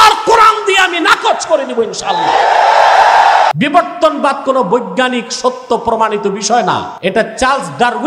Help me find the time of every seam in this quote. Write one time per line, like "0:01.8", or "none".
0:03.5
0:06.9